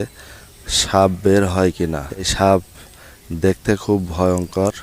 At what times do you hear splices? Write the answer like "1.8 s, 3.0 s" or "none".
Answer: 2.3 s